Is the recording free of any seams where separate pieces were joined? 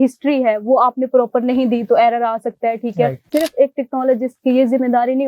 no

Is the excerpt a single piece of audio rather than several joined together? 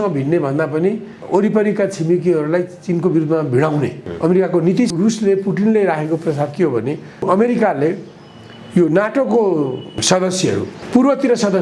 no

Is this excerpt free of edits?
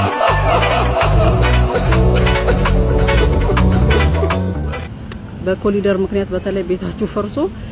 no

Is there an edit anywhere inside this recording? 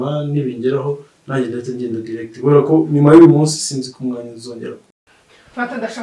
yes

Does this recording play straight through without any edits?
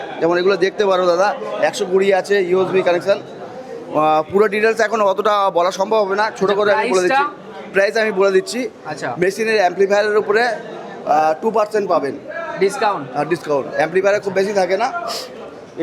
yes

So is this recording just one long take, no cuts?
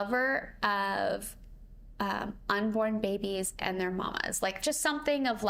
yes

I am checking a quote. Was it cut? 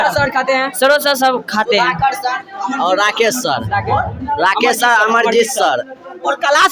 no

